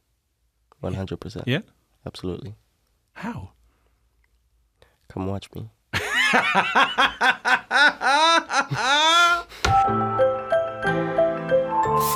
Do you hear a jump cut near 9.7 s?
yes; 1 cut; at 9.7 s

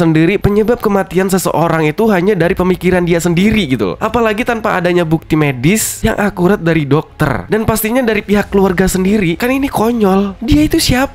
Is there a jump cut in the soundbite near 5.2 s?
no; 0 cuts

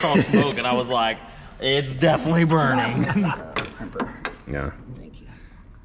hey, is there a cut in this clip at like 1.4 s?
no; 1 cut; at 3.4 s

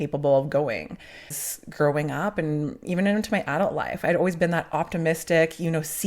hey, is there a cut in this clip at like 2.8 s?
no; 1 cut; at 1.3 s

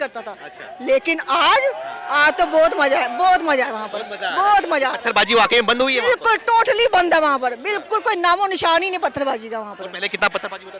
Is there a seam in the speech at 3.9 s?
no; 0 cuts

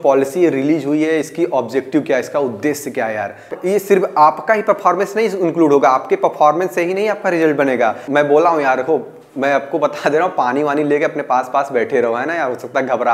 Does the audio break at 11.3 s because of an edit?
no; 2 cuts; at 3.5 s, 8.0 s

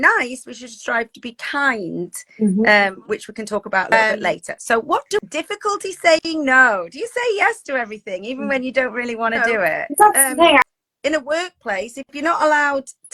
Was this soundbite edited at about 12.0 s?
no; 2 cuts; at 5.2 s, 10.7 s

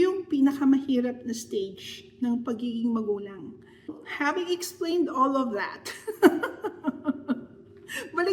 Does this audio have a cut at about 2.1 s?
no; 1 cut; at 4.0 s

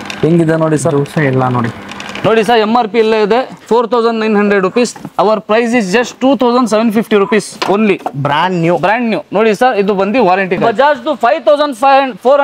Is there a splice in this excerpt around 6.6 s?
no; 2 cuts; at 2.0 s, 10.6 s

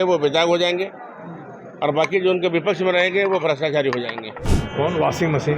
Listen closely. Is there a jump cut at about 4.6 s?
yes; 1 cut; at 4.6 s

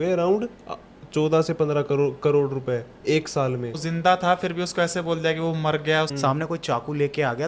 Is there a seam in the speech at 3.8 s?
yes; 2 cuts; at 3.8 s, 6.1 s

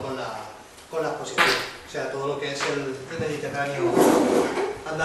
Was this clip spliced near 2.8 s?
yes; 1 cut; at 2.8 s

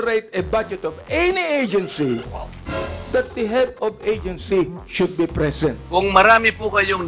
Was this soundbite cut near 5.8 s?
yes; 1 cut; at 5.8 s

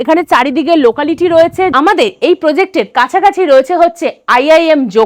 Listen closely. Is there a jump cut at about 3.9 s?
no; 1 cut; at 1.7 s

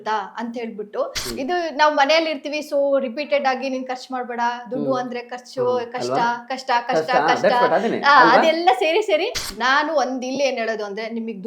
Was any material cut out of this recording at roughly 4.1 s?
no; 2 cuts; at 1.2 s, 9.4 s

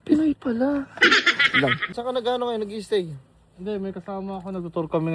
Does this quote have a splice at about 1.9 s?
yes; 1 cut; at 1.9 s

